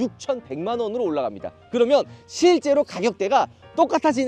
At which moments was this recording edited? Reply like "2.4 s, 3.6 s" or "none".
none